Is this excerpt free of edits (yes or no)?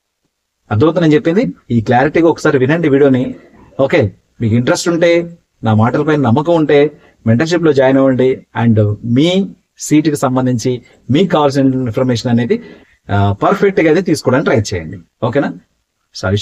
yes